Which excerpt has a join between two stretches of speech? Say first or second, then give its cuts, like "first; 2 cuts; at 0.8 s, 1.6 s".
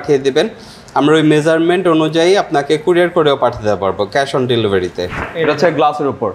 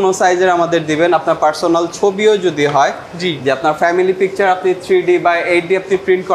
first; 1 cut; at 5.1 s